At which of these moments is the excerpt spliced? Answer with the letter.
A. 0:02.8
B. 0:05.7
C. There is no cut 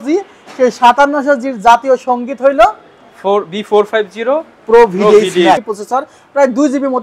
B